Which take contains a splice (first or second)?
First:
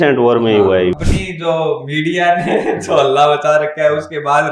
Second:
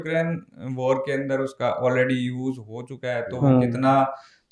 first